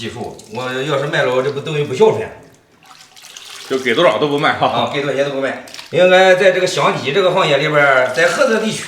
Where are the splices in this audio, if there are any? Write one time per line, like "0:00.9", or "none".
0:05.6